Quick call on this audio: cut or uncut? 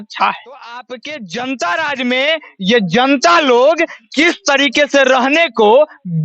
cut